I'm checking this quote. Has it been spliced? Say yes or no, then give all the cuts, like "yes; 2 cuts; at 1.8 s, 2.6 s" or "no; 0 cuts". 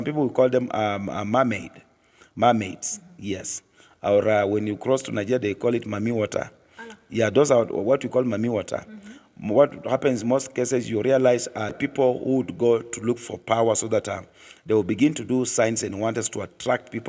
yes; 1 cut; at 11.7 s